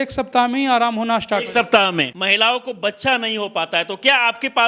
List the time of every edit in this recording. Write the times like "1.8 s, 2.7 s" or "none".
2.1 s

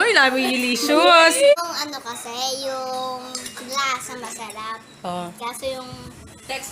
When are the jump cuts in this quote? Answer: 1.5 s

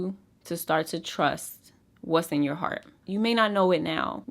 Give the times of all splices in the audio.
2.9 s

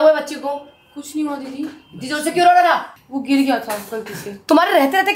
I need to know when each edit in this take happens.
none

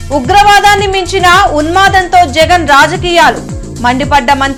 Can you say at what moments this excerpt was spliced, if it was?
none

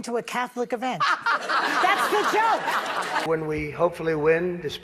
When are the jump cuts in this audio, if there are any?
3.2 s

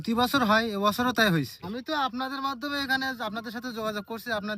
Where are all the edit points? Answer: 1.6 s

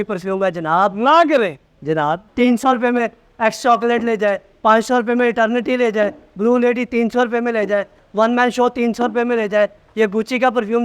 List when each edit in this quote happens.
2.2 s

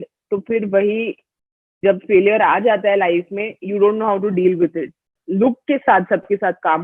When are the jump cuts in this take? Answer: 5.2 s

